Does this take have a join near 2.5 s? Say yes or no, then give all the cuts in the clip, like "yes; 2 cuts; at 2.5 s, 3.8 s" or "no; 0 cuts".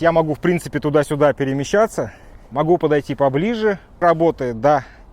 yes; 2 cuts; at 2.5 s, 4.0 s